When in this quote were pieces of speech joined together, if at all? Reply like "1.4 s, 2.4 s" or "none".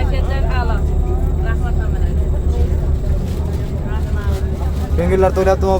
none